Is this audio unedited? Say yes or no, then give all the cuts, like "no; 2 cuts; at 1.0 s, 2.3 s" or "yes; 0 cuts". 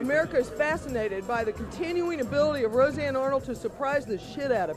yes; 0 cuts